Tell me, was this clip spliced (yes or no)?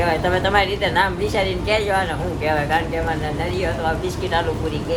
no